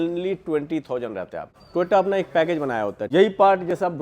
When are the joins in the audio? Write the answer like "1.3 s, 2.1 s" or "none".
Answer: 1.5 s, 3.0 s